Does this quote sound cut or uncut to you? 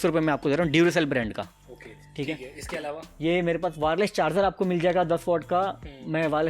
uncut